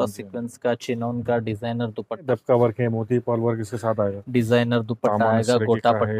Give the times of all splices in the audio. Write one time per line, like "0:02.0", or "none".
0:02.2